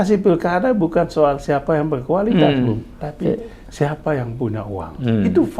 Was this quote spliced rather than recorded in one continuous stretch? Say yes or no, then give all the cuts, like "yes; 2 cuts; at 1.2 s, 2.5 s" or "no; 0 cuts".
yes; 1 cut; at 3.0 s